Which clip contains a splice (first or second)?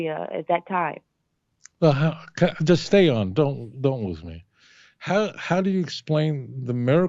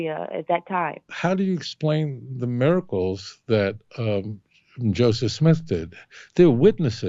second